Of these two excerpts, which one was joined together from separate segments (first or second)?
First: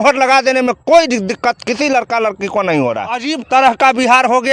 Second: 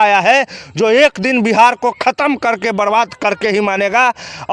first